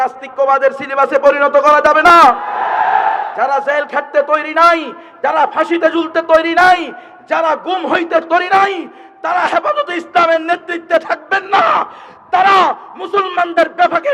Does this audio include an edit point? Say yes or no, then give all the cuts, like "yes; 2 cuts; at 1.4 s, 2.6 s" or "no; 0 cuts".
no; 0 cuts